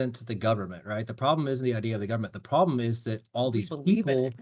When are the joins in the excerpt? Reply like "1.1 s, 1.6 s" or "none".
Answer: none

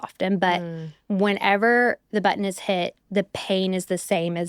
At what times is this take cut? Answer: none

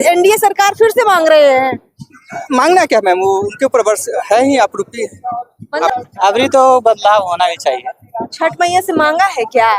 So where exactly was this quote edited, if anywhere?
5.9 s

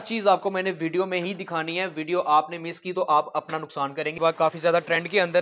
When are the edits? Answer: 4.1 s

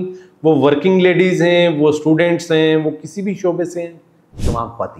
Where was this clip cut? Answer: none

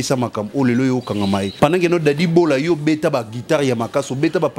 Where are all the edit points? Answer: 1.5 s

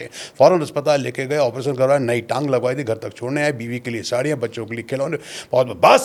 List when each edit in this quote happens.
none

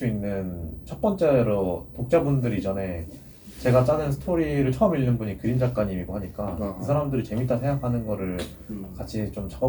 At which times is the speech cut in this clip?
none

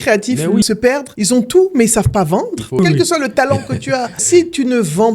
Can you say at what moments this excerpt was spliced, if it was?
0.9 s, 2.8 s, 4.2 s

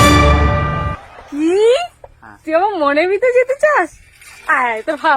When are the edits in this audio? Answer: none

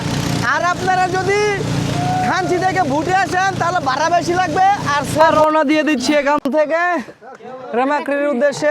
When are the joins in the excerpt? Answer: 5.3 s

